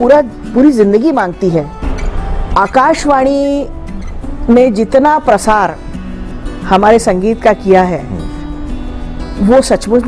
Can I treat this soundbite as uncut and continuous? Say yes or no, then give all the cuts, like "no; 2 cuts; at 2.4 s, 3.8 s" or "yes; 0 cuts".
no; 1 cut; at 1.8 s